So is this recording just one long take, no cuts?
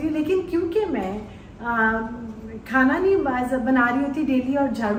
yes; 0 cuts

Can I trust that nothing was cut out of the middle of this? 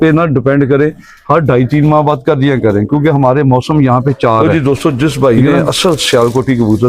no; 1 cut; at 4.4 s

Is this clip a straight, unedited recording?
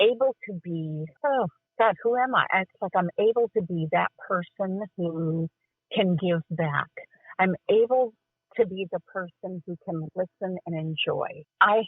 no; 1 cut; at 1.0 s

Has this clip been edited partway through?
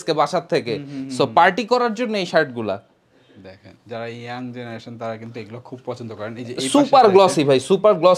no; 0 cuts

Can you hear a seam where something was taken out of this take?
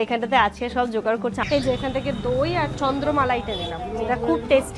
yes; 1 cut; at 1.4 s

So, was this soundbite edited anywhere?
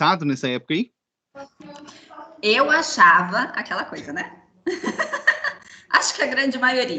no; 0 cuts

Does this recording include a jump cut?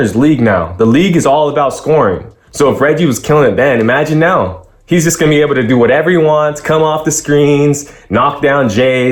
no; 0 cuts

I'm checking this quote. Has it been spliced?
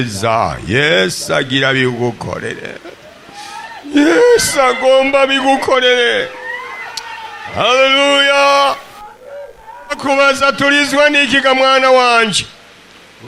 no; 0 cuts

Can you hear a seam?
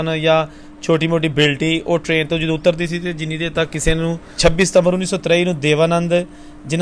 yes; 1 cut; at 4.3 s

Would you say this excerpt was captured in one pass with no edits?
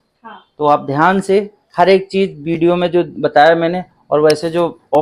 yes; 0 cuts

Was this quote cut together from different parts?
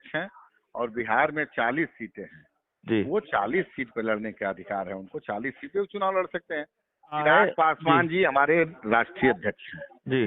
yes; 1 cut; at 7.2 s

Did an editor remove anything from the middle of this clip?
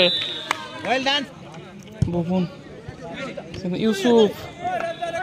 yes; 1 cut; at 1.2 s

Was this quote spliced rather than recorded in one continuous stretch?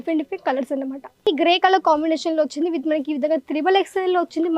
yes; 1 cut; at 1.3 s

